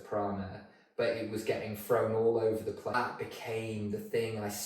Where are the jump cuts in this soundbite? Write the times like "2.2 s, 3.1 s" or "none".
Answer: 2.9 s